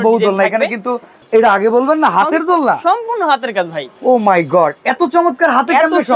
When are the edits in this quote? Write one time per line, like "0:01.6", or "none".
0:01.1